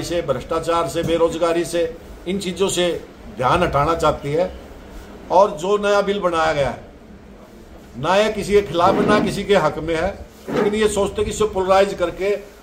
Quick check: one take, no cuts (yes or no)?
yes